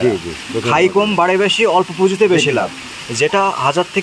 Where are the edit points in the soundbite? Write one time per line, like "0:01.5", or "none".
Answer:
none

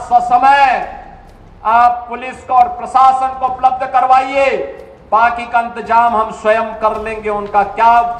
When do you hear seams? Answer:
none

